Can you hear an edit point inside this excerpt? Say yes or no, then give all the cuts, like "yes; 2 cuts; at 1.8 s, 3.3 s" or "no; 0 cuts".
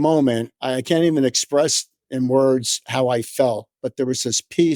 no; 0 cuts